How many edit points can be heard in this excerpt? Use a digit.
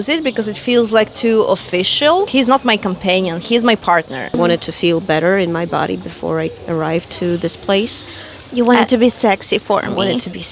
2